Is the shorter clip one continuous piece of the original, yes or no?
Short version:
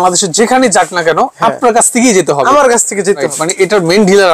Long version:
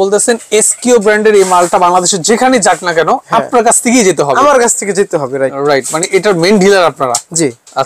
no